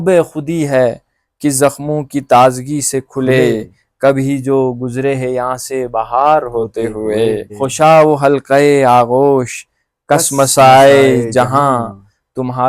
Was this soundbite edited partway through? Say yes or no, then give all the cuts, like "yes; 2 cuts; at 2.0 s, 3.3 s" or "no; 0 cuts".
yes; 1 cut; at 7.5 s